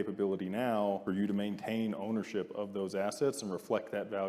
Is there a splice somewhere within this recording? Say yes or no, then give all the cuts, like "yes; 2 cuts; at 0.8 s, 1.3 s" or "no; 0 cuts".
yes; 1 cut; at 1.0 s